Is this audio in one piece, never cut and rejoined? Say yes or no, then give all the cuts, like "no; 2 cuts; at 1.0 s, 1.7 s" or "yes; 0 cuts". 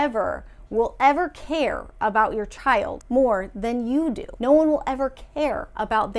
no; 2 cuts; at 3.0 s, 4.3 s